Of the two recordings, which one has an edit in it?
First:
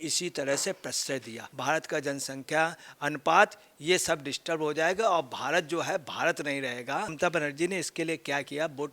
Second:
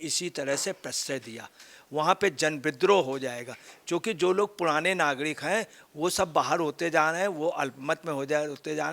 first; 2 cuts; at 1.4 s, 7.1 s

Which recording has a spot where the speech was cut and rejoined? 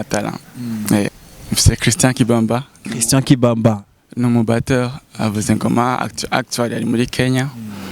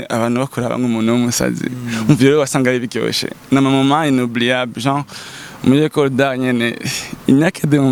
first; 1 cut; at 1.1 s

